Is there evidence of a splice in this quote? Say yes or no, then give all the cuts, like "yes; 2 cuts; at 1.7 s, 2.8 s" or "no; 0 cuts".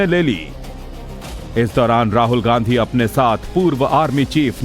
yes; 1 cut; at 2.1 s